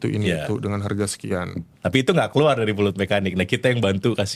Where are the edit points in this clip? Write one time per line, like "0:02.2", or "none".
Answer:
0:01.6